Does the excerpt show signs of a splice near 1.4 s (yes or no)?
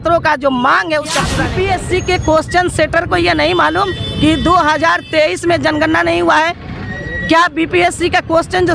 yes